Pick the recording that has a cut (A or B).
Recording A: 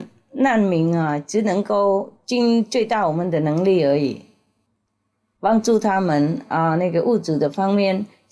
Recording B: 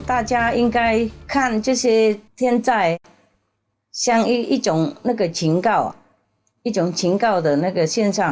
B